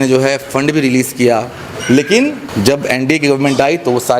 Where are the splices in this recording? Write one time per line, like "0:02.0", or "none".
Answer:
0:02.4